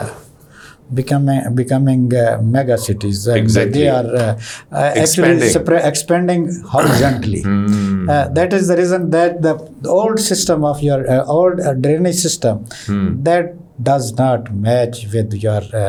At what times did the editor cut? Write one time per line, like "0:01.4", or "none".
none